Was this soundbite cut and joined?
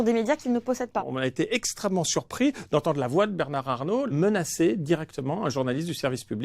yes; 2 cuts; at 1.1 s, 4.1 s

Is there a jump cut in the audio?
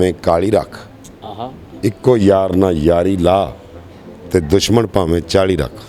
no; 0 cuts

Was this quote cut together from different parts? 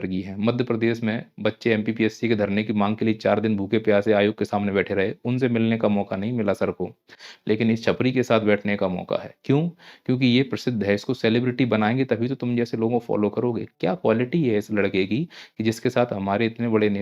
no; 0 cuts

